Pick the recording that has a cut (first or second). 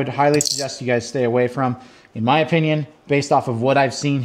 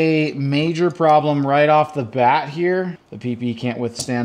second